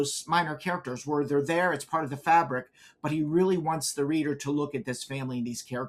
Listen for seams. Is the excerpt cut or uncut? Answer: uncut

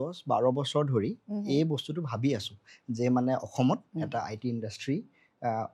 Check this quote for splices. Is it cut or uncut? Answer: uncut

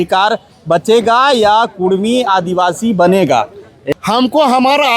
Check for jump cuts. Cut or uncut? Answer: cut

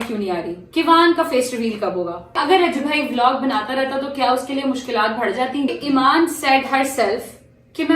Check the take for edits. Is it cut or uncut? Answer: cut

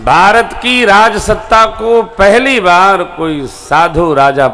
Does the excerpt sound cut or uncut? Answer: uncut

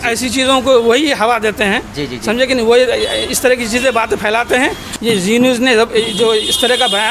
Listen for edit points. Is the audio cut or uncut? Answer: cut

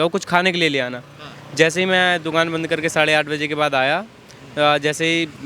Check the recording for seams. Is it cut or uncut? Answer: uncut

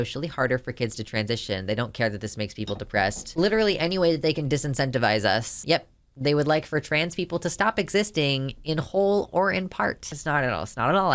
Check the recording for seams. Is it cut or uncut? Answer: cut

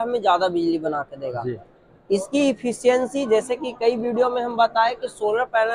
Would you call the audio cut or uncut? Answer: uncut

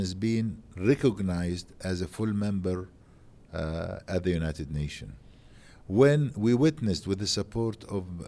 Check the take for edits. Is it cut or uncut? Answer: uncut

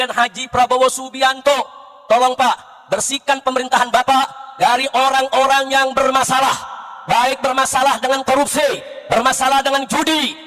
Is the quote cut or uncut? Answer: cut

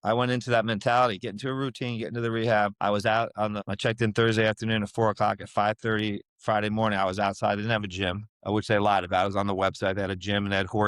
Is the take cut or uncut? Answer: cut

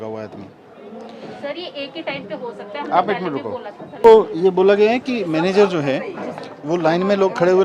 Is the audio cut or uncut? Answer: cut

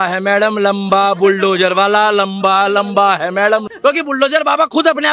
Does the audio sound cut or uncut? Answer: cut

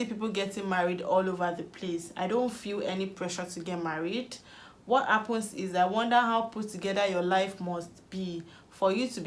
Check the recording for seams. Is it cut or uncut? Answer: uncut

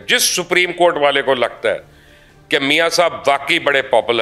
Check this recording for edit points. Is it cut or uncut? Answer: uncut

